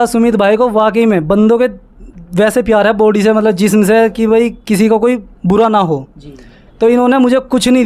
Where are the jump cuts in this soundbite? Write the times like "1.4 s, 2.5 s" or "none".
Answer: none